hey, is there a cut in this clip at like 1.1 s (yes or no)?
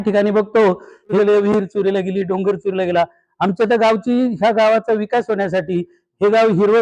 yes